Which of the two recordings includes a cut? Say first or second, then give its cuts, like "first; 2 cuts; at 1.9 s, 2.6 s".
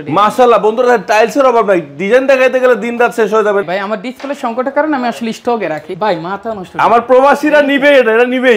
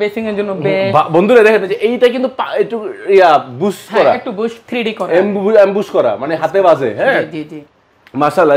first; 2 cuts; at 3.6 s, 5.9 s